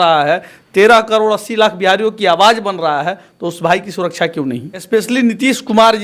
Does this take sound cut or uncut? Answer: cut